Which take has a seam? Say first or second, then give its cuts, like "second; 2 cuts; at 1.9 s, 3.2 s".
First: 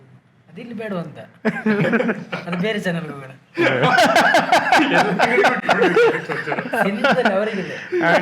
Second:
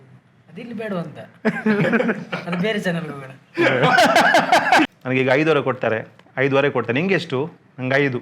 second; 1 cut; at 4.9 s